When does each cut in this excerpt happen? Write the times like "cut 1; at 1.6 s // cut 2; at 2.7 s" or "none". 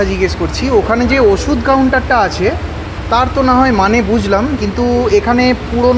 cut 1; at 4.6 s